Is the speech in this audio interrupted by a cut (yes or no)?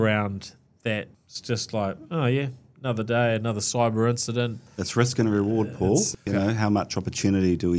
yes